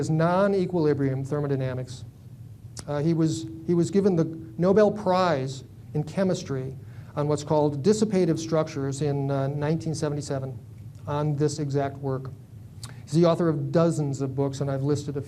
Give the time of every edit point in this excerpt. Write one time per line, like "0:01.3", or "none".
0:01.4